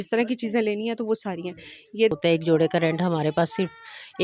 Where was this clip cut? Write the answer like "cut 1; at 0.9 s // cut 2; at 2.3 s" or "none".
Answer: cut 1; at 2.1 s